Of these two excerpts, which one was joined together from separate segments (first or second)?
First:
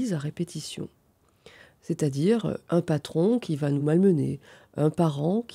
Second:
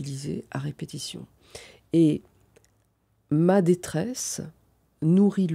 first